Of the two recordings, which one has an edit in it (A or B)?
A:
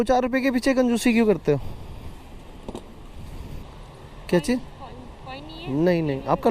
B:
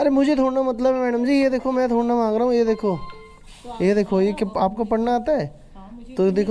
A